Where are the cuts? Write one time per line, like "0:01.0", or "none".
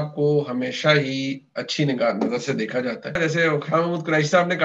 0:03.2

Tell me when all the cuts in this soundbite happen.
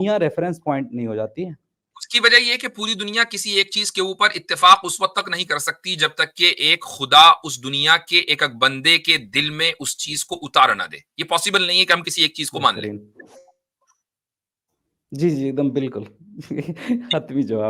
none

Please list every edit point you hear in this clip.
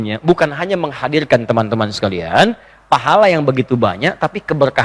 none

